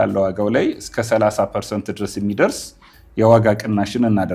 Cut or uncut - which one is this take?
uncut